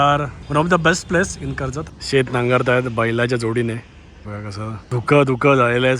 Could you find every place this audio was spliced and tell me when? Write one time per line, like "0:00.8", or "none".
0:01.9